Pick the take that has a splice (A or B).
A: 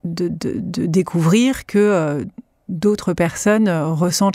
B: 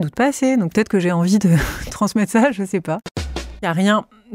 B